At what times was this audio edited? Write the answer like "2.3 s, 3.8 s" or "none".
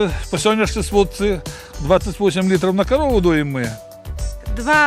3.9 s

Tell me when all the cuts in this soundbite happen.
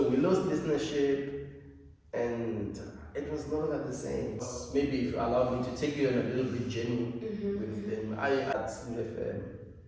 4.5 s, 8.5 s

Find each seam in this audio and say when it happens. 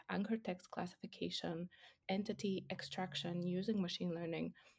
2.0 s

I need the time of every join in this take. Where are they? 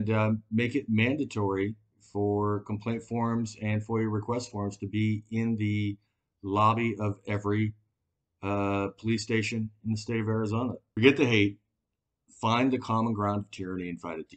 10.8 s

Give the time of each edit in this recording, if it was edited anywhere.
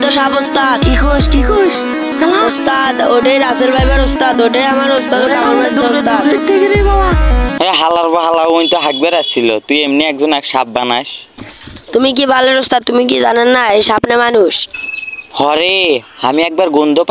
7.5 s

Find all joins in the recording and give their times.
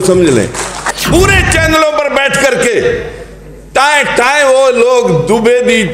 0.9 s

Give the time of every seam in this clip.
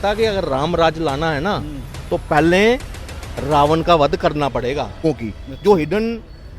5.0 s

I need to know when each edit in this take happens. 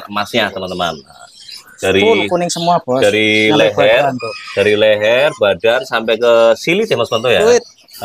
none

